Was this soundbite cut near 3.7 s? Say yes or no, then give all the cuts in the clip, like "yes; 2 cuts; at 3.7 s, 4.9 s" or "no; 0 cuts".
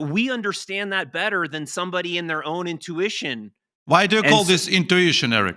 yes; 1 cut; at 3.7 s